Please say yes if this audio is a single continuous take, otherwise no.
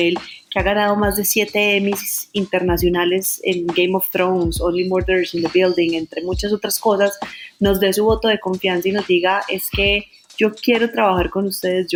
yes